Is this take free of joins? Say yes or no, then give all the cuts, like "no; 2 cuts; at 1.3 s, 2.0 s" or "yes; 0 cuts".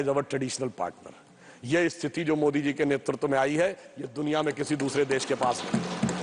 yes; 0 cuts